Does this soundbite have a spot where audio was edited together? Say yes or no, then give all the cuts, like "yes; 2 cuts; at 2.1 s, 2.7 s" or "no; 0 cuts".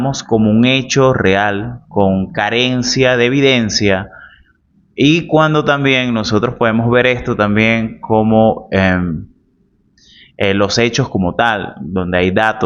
no; 0 cuts